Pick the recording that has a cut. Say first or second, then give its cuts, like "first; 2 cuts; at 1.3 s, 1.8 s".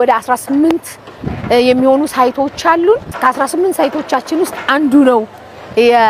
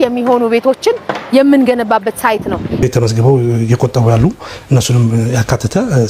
second; 1 cut; at 2.8 s